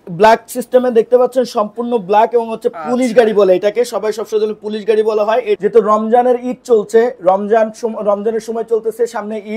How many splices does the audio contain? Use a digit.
1